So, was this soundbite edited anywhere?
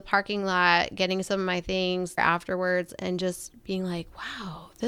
yes; 1 cut; at 2.2 s

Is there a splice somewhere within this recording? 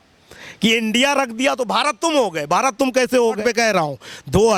yes; 1 cut; at 3.4 s

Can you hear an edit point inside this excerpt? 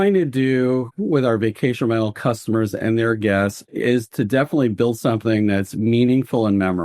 no; 0 cuts

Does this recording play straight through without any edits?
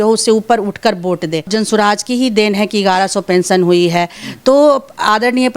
no; 1 cut; at 1.5 s

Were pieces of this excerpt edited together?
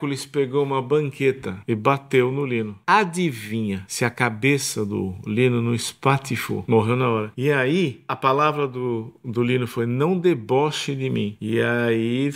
yes; 7 cuts; at 1.5 s, 2.8 s, 3.9 s, 6.6 s, 7.3 s, 8.1 s, 11.4 s

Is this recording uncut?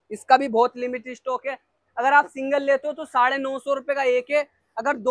yes; 0 cuts

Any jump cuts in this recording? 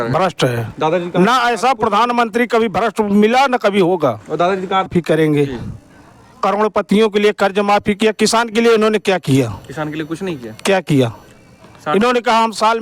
yes; 1 cut; at 4.9 s

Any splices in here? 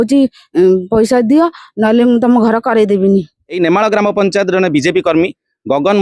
yes; 1 cut; at 3.5 s

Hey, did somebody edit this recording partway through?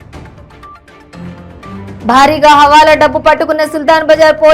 yes; 1 cut; at 1.9 s

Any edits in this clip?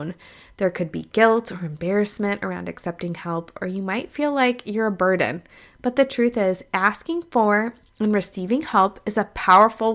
no; 0 cuts

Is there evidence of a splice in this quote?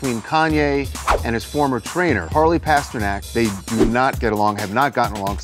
yes; 2 cuts; at 2.2 s, 3.3 s

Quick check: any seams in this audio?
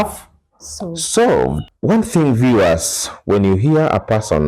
yes; 1 cut; at 1.7 s

